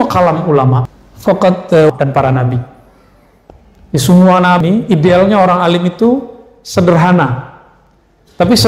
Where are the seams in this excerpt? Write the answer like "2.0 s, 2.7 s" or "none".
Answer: 0.8 s, 1.9 s, 4.6 s